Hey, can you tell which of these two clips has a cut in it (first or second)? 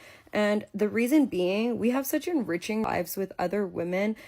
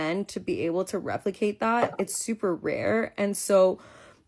first